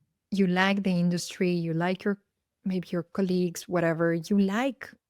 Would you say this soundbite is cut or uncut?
uncut